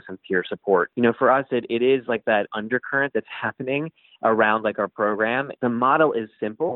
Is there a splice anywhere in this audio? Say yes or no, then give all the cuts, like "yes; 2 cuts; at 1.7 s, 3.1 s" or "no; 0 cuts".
yes; 3 cuts; at 0.9 s, 2.5 s, 5.5 s